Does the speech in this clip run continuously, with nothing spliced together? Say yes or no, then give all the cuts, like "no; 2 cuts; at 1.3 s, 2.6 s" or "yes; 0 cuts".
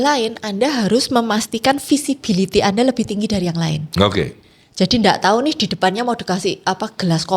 yes; 0 cuts